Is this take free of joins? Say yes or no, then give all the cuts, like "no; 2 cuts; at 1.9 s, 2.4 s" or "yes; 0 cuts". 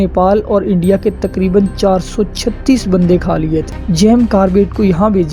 no; 1 cut; at 3.8 s